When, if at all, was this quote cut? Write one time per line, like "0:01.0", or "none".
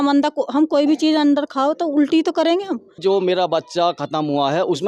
0:03.0

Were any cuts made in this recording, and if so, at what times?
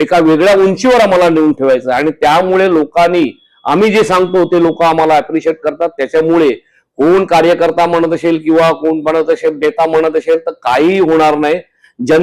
none

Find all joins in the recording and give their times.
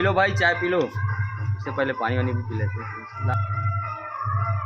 none

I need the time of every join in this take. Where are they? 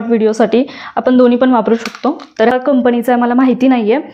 0:02.5

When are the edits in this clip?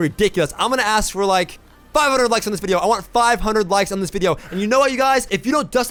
none

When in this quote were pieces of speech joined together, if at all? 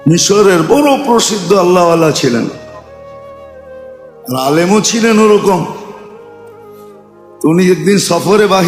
0:02.6
0:04.2

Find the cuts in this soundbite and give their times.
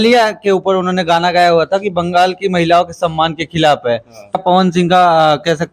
0:04.4

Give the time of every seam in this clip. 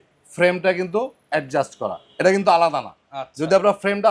none

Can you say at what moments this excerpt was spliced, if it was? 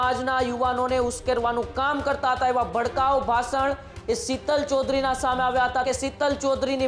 0:05.9

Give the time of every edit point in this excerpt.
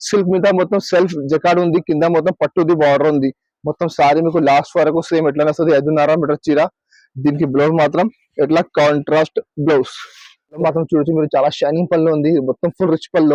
0:10.6

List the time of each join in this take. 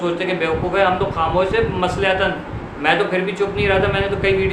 none

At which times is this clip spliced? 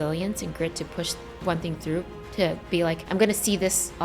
0:03.0

